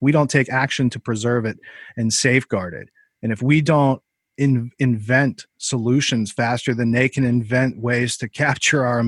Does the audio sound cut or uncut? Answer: uncut